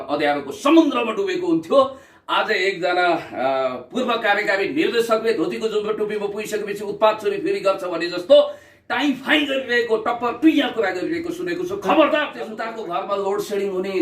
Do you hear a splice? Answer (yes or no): yes